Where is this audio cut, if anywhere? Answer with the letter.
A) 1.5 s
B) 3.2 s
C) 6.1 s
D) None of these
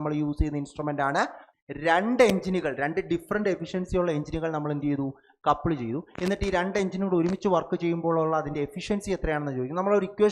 A